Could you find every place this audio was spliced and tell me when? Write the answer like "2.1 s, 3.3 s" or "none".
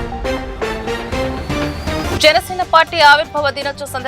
2.0 s